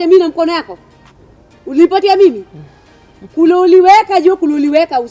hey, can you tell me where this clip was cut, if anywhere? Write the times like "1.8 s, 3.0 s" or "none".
none